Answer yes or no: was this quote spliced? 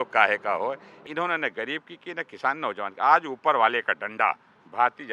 yes